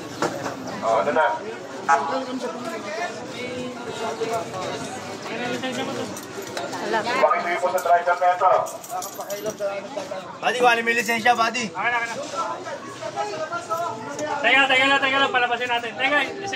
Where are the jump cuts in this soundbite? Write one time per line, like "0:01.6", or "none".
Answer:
none